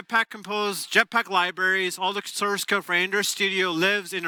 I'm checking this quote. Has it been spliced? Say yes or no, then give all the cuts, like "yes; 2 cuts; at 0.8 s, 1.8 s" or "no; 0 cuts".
no; 0 cuts